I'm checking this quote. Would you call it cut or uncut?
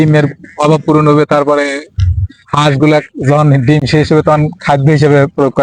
uncut